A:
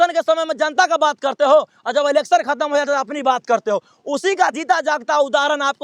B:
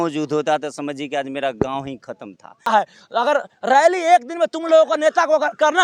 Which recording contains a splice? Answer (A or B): B